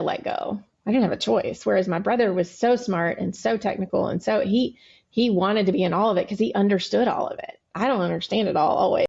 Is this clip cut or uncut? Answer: uncut